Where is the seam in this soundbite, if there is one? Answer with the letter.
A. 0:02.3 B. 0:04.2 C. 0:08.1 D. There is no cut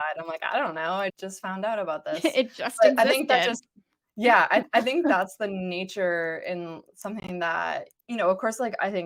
D